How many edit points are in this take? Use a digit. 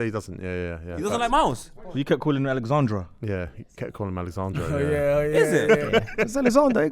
1